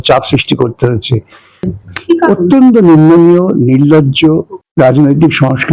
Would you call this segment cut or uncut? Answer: cut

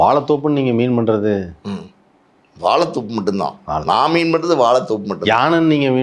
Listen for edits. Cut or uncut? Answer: uncut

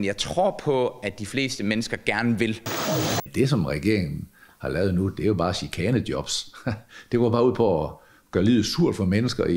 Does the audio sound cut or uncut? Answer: cut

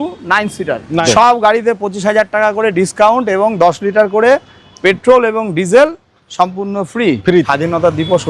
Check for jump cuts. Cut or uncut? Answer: cut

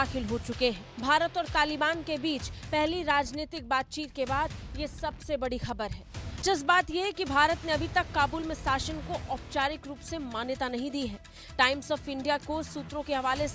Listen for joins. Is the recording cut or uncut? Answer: uncut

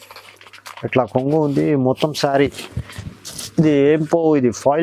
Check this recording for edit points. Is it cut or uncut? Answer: uncut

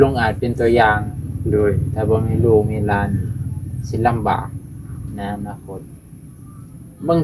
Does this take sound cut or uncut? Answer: uncut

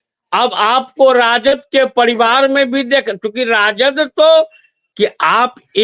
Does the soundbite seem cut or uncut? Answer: cut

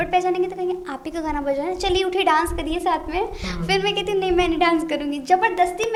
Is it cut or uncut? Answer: uncut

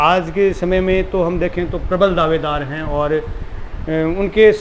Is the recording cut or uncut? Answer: uncut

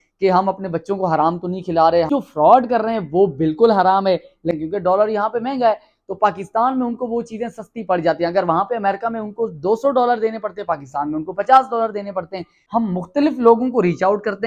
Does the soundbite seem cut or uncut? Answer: cut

